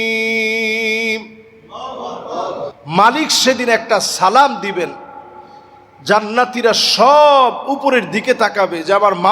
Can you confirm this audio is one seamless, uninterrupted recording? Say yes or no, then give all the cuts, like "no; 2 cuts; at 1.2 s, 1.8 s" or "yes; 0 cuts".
no; 1 cut; at 2.8 s